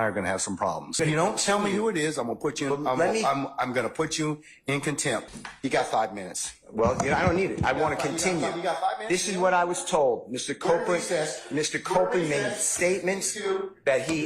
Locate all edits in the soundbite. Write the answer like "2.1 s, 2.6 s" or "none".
1.0 s, 5.3 s